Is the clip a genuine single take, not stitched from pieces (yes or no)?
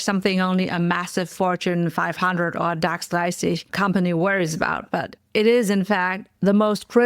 no